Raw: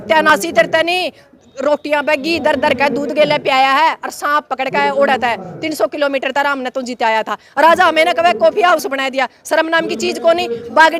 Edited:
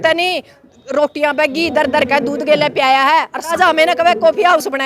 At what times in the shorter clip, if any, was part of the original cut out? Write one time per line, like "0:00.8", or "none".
0:03.6